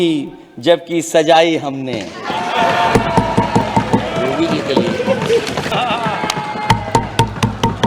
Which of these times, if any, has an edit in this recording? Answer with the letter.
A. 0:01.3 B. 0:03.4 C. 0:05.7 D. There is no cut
C